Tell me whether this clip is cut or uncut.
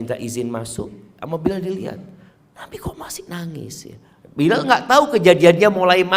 cut